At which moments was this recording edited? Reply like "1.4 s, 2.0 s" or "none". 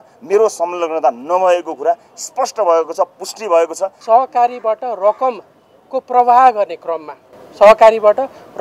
3.9 s